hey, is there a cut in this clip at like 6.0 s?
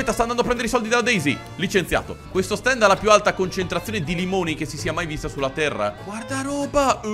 yes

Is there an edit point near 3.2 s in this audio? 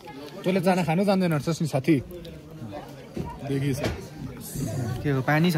no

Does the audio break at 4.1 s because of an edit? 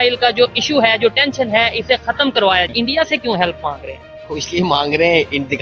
no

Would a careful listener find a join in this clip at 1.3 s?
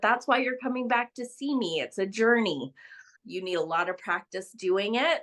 no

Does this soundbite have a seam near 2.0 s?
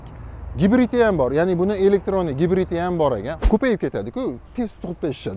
no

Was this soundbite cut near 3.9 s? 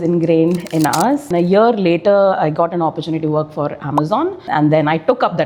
no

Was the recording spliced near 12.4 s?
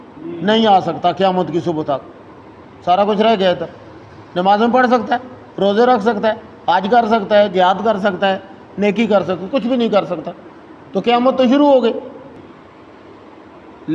yes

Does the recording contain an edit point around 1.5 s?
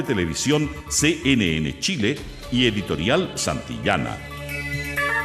no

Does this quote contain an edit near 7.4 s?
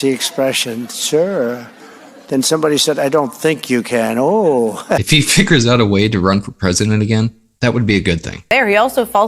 yes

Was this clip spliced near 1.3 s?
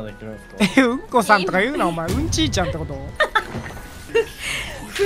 no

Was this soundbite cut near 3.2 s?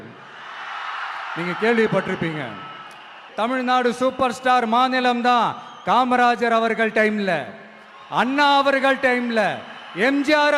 yes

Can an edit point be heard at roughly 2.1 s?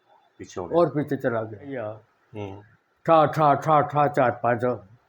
yes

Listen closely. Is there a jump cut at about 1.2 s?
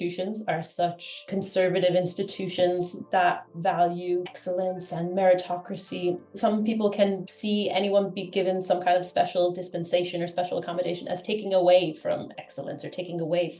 yes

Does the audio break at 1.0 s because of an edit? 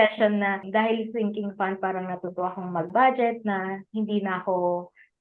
no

